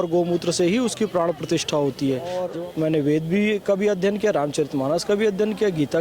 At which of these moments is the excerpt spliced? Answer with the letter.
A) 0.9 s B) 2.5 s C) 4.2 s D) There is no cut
B